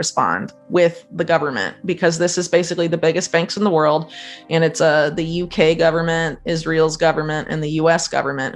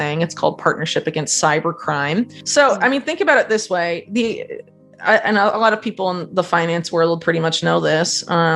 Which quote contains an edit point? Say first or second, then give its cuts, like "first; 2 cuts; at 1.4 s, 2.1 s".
second; 1 cut; at 2.4 s